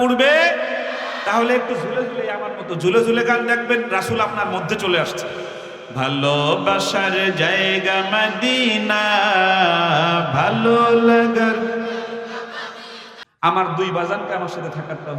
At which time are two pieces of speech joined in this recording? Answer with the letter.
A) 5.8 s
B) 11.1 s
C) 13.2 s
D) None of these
C